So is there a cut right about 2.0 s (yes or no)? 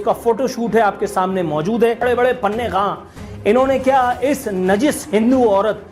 yes